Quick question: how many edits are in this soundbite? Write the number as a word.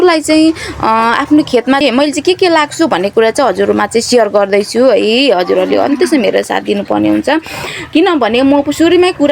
one